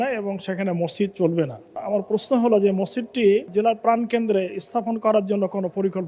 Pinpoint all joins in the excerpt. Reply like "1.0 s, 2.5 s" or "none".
1.8 s, 3.5 s